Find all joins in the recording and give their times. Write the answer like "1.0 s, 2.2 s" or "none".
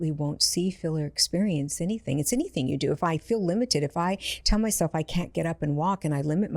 none